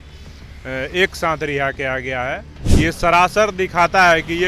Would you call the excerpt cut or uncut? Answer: cut